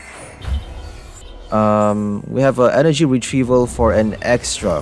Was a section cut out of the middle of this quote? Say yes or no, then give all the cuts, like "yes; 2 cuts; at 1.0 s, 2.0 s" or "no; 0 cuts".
yes; 1 cut; at 1.2 s